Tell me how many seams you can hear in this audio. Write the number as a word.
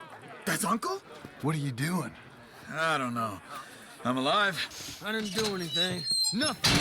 one